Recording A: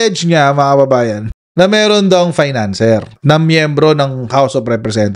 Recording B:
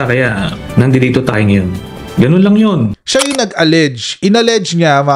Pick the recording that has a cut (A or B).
B